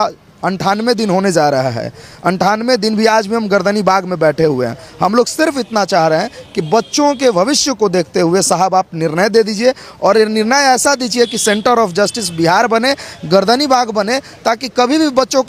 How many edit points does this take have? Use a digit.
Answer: 0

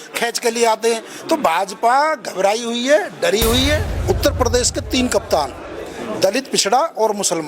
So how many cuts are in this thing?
1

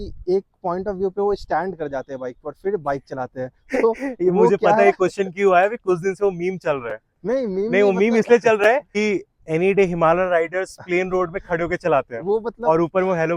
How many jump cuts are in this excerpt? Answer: 0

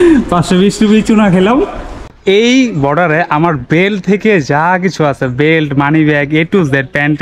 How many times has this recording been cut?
1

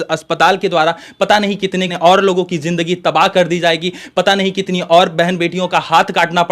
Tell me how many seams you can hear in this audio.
1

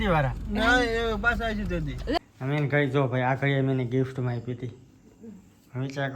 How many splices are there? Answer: 1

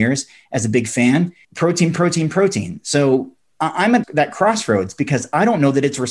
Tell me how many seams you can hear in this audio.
2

